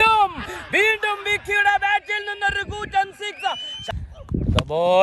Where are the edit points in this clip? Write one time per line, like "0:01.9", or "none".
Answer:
0:03.9